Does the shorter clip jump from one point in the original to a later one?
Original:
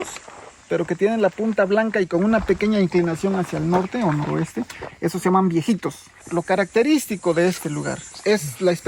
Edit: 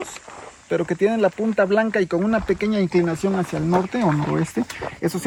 no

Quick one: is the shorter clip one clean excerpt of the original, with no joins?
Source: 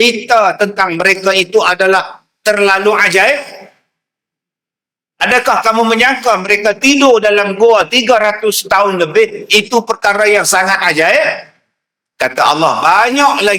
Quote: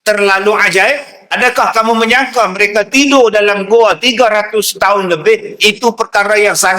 no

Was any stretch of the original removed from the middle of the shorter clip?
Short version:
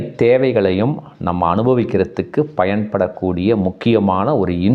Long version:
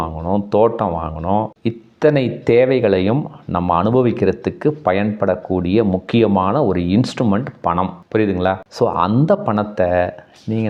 no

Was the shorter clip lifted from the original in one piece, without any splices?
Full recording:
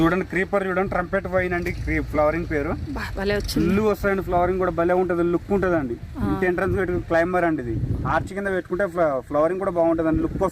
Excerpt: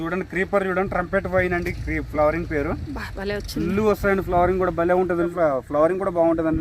no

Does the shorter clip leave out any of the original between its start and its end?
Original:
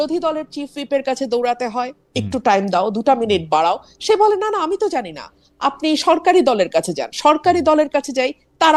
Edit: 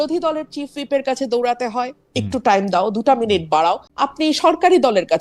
yes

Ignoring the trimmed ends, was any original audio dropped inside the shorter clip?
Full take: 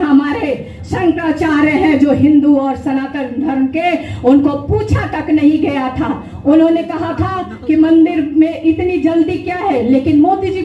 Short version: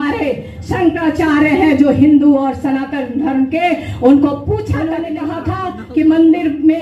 yes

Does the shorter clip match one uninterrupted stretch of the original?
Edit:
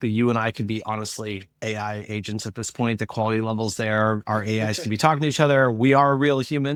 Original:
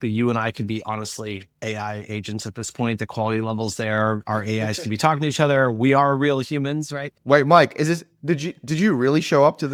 yes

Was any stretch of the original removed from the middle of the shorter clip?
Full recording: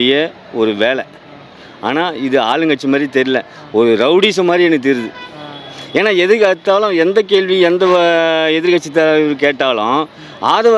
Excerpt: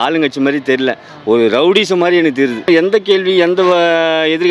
yes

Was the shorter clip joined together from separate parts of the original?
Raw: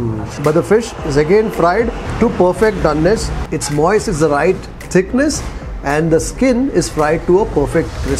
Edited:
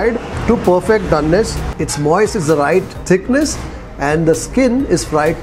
yes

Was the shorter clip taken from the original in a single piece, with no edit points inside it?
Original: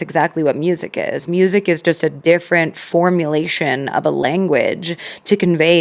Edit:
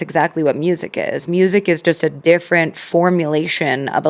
yes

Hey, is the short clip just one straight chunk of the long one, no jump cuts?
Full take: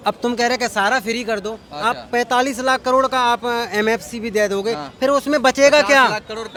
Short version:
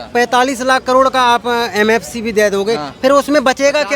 yes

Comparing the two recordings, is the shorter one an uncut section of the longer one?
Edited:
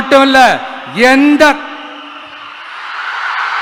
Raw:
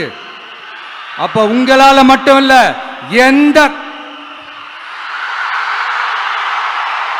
yes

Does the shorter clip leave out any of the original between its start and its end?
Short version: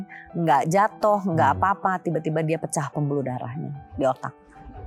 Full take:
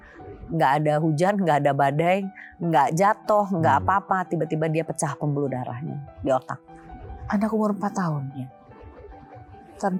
no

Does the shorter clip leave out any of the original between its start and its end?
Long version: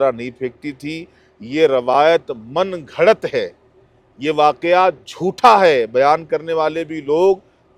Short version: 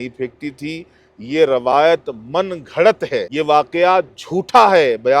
yes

